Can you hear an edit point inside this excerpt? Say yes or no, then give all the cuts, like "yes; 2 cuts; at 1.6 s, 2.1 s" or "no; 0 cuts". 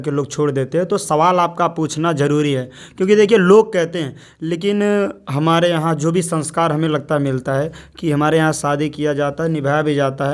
no; 0 cuts